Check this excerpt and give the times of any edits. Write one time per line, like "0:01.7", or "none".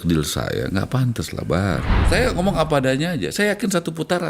0:02.0